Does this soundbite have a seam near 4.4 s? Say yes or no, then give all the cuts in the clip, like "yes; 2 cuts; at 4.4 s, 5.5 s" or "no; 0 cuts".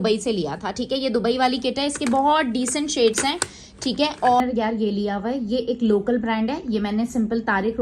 yes; 1 cut; at 4.4 s